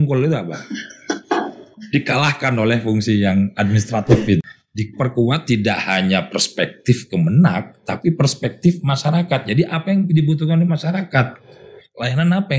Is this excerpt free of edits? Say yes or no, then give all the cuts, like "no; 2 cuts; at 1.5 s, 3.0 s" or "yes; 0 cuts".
no; 1 cut; at 4.4 s